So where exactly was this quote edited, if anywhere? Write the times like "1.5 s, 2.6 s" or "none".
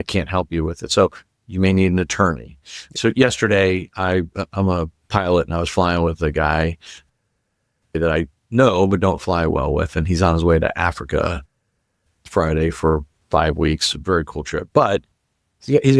2.9 s, 8.0 s, 13.1 s